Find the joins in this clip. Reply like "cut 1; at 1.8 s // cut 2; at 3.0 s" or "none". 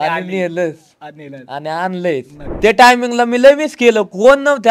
cut 1; at 2.4 s